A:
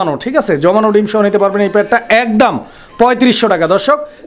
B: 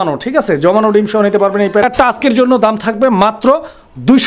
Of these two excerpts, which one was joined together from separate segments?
B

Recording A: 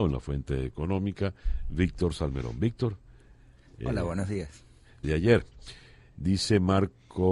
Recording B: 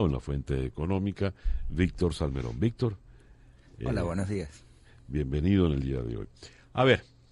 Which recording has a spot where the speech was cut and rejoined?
B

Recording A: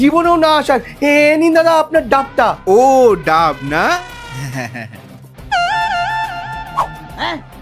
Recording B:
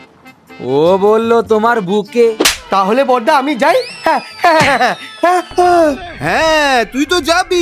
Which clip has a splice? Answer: B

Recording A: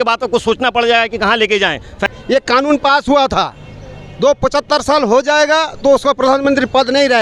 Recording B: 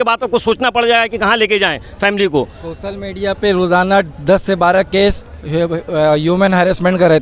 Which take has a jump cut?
A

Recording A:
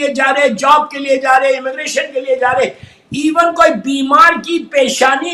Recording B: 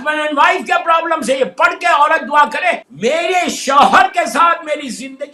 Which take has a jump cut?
B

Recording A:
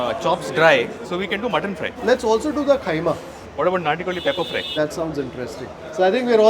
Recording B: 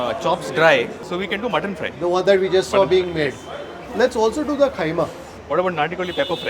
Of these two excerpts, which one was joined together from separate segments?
A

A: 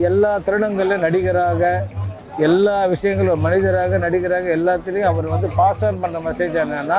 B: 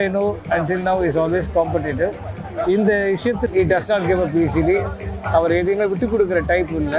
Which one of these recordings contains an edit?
B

